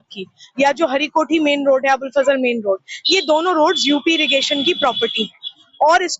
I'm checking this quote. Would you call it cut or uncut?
uncut